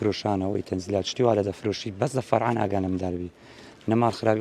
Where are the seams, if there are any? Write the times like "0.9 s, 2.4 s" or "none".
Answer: none